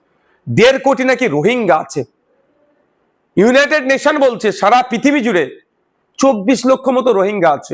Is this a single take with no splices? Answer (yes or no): yes